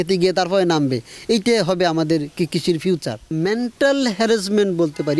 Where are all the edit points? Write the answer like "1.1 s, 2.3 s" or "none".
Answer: 3.3 s